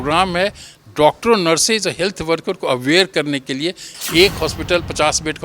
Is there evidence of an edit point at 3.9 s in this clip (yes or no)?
yes